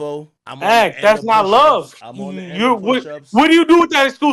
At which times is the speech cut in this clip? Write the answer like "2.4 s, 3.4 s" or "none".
none